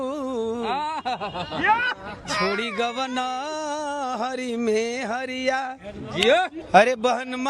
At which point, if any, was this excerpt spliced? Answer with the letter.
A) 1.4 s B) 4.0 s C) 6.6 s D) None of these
C